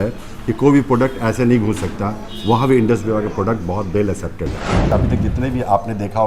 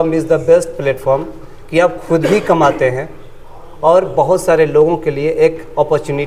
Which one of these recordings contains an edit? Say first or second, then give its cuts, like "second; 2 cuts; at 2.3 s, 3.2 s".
first; 1 cut; at 4.9 s